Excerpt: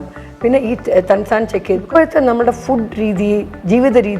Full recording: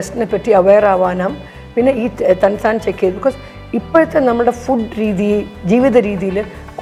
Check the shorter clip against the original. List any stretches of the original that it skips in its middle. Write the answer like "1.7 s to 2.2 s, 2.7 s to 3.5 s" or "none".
3.2 s to 3.8 s